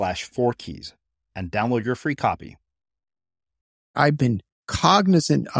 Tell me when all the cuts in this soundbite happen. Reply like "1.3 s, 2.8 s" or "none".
3.9 s